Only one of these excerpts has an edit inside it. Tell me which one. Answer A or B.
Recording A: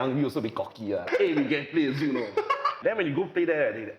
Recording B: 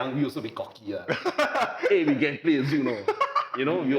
A